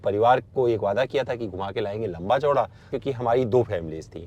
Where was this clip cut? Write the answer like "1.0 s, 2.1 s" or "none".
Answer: 2.9 s